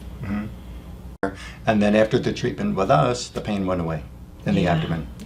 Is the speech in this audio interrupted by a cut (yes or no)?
yes